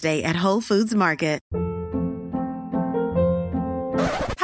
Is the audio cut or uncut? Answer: cut